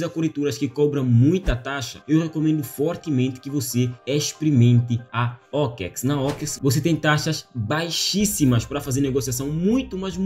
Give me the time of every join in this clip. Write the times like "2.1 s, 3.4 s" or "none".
none